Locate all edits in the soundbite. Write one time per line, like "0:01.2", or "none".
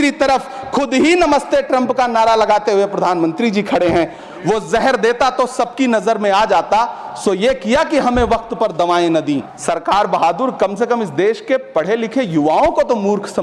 0:04.2
0:09.5